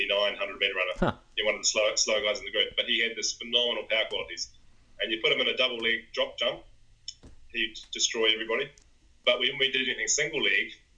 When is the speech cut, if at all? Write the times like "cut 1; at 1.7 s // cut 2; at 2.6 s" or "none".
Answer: cut 1; at 8.8 s